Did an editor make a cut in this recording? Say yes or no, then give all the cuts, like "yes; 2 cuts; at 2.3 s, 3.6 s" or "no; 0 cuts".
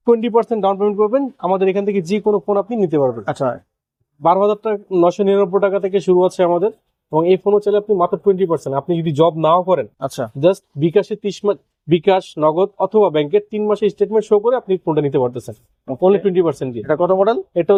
no; 0 cuts